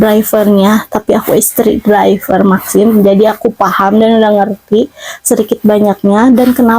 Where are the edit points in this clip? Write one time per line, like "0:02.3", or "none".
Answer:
none